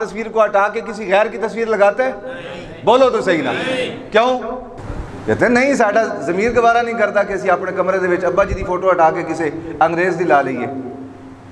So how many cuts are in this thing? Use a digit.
0